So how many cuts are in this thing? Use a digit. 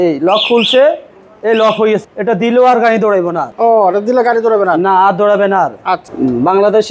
2